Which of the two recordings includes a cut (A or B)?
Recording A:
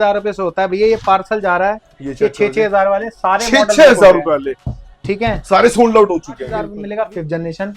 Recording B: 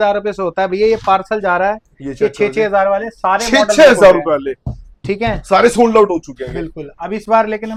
A